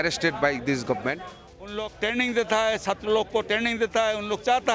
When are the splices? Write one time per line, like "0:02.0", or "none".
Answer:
0:01.8